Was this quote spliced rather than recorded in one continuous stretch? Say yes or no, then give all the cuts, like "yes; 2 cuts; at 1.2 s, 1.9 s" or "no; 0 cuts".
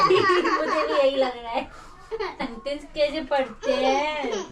yes; 1 cut; at 2.4 s